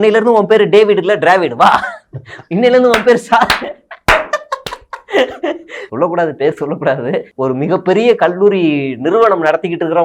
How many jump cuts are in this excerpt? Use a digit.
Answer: 2